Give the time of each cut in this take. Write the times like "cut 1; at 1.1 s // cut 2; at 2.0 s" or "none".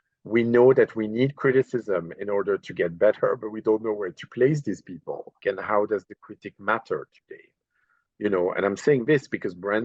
cut 1; at 5.4 s